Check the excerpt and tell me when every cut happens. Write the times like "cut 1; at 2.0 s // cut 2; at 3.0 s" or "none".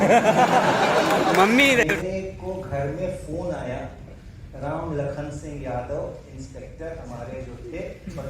cut 1; at 1.8 s